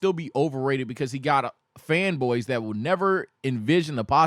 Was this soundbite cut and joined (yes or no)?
no